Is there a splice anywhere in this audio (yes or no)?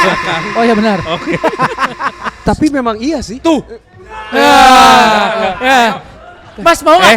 yes